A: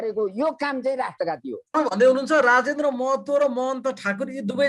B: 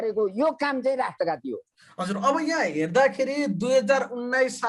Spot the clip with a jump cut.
A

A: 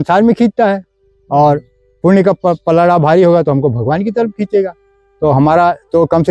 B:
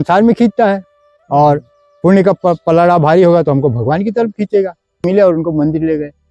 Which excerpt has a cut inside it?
B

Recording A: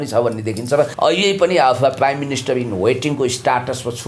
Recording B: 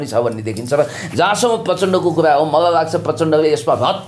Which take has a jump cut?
A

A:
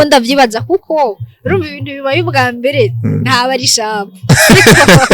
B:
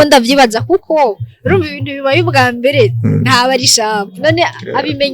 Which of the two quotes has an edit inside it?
B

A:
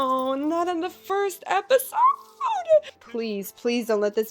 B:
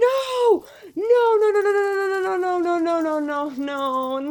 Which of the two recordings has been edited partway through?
A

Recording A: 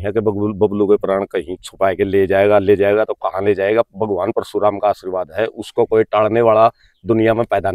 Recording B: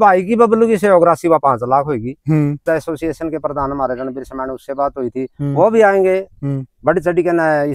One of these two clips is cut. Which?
B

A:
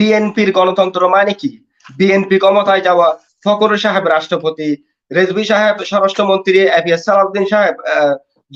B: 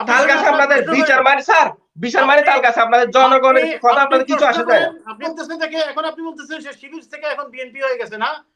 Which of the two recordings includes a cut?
B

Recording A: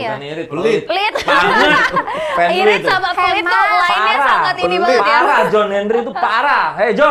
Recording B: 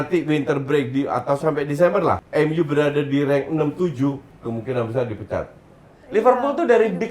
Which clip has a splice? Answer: B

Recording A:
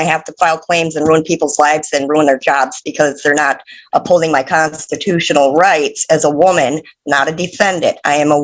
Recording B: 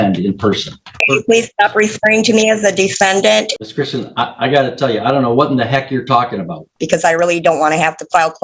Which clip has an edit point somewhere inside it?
B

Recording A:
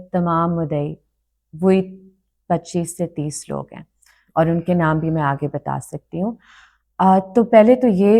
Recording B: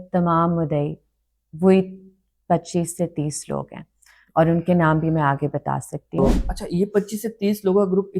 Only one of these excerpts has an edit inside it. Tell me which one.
B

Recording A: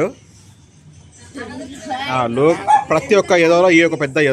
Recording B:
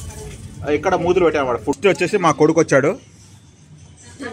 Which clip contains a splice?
B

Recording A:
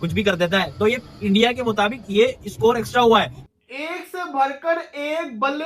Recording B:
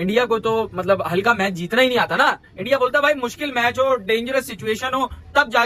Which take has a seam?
A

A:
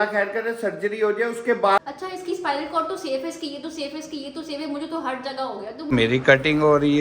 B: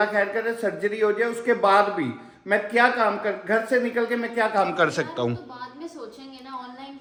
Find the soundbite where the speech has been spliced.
A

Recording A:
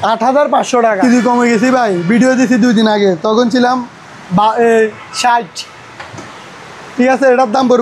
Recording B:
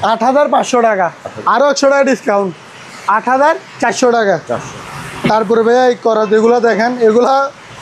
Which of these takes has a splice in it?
A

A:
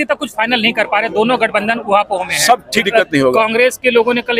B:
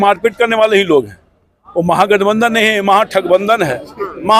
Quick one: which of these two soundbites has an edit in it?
A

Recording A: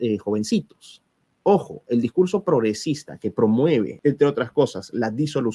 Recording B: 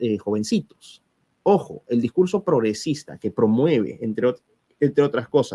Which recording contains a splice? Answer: A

